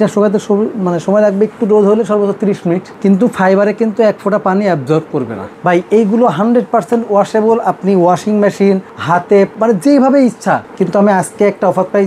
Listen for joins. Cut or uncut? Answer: cut